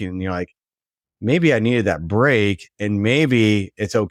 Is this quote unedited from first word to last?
yes; 0 cuts

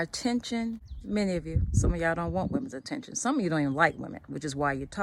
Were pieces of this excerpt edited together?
yes; 1 cut; at 0.9 s

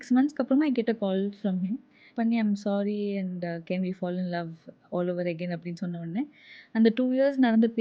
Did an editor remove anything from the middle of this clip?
yes; 1 cut; at 2.1 s

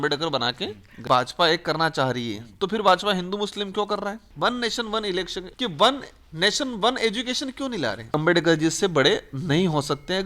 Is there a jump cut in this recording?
yes; 4 cuts; at 1.0 s, 4.2 s, 5.4 s, 8.1 s

